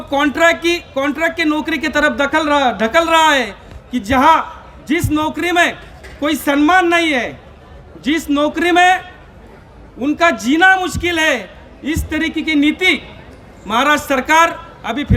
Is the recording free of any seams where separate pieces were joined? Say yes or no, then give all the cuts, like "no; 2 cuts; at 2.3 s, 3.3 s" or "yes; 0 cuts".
yes; 0 cuts